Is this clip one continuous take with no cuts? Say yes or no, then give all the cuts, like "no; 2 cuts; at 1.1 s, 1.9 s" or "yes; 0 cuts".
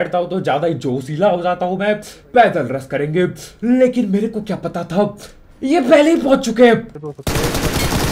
no; 1 cut; at 6.9 s